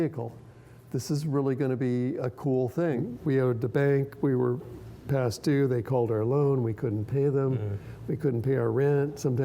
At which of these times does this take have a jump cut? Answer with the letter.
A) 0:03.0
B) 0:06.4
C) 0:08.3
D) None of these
A